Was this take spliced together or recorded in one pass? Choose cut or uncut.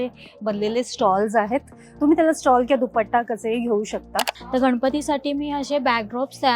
cut